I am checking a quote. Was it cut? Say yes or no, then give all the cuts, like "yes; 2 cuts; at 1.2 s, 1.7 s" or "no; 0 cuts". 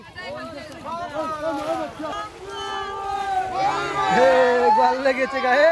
yes; 1 cut; at 2.1 s